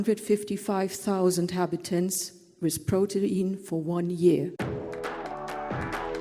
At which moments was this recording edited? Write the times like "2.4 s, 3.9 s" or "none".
4.5 s